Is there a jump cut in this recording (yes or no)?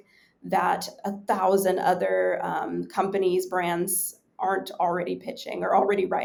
no